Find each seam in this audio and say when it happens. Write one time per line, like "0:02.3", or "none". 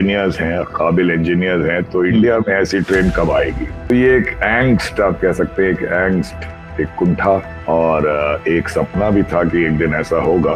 0:03.9
0:07.5